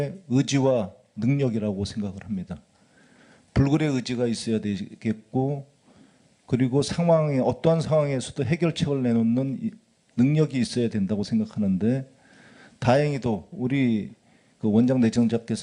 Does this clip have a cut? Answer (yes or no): no